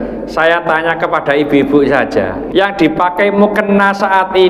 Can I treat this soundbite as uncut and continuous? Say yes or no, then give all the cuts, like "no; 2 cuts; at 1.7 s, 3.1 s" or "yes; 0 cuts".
no; 1 cut; at 2.4 s